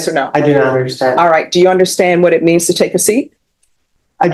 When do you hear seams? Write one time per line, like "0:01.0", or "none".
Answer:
none